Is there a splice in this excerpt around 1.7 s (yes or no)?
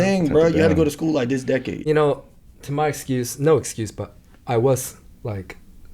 yes